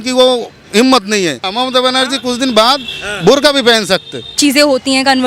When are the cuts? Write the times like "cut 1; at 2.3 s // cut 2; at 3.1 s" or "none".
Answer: cut 1; at 1.4 s // cut 2; at 4.2 s